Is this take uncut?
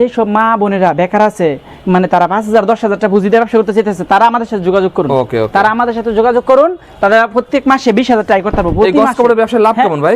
yes; 0 cuts

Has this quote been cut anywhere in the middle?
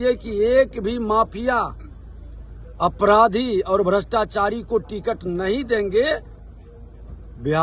no; 0 cuts

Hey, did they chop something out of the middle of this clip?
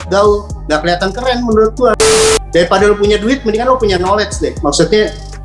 yes; 1 cut; at 1.9 s

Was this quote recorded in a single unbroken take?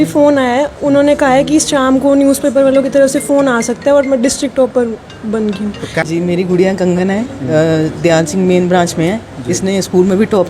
no; 1 cut; at 6.0 s

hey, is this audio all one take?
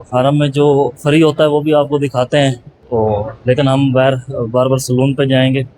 no; 1 cut; at 2.7 s

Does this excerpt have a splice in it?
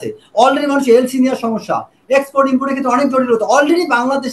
no; 0 cuts

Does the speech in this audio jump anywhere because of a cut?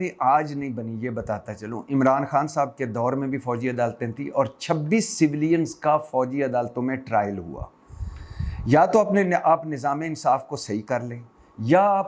no; 0 cuts

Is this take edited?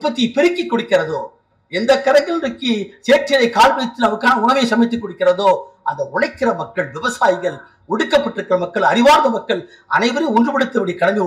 no; 0 cuts

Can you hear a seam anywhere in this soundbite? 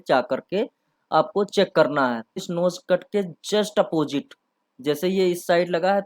yes; 1 cut; at 2.4 s

